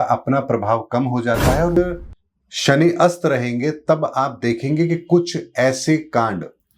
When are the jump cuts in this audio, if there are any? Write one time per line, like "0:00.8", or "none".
0:01.8